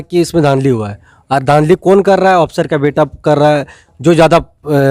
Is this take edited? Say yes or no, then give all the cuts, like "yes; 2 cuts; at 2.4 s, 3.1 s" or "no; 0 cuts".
no; 0 cuts